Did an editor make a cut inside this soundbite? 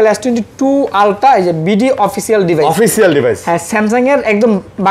no; 0 cuts

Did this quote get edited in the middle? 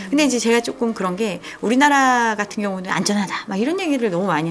no; 0 cuts

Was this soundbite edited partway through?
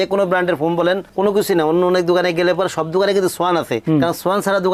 no; 0 cuts

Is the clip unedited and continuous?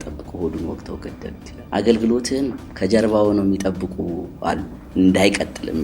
no; 2 cuts; at 1.5 s, 4.8 s

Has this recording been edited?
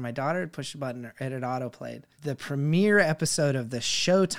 yes; 1 cut; at 2.1 s

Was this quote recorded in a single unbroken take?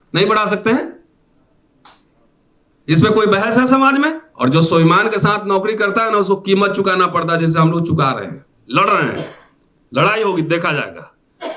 no; 1 cut; at 4.3 s

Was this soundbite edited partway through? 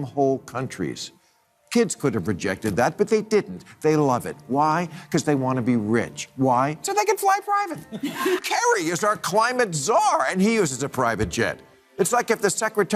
yes; 1 cut; at 8.4 s

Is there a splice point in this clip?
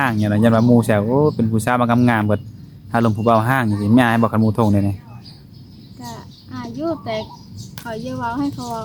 no; 0 cuts

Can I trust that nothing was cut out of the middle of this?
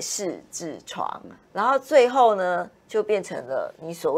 yes; 0 cuts

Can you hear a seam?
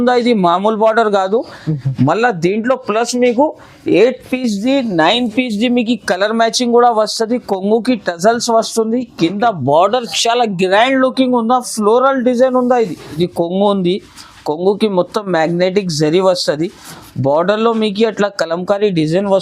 yes; 1 cut; at 13.2 s

